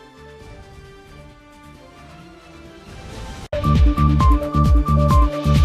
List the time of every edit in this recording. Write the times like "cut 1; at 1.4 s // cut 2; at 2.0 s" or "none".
cut 1; at 3.4 s